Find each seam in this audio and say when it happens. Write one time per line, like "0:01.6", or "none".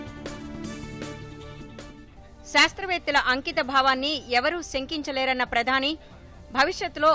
0:02.1